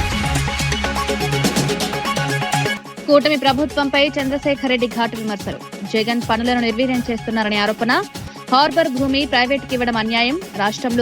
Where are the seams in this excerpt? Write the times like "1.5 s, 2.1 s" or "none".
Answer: 0.9 s, 2.3 s